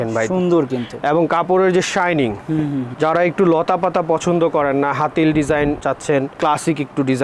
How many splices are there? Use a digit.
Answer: 0